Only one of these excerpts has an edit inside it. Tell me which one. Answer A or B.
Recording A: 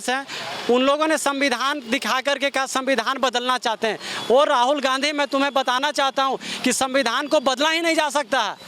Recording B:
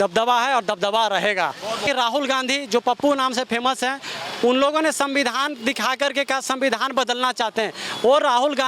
B